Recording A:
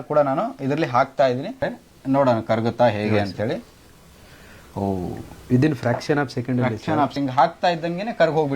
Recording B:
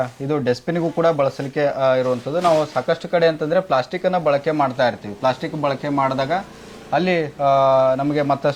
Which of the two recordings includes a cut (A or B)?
A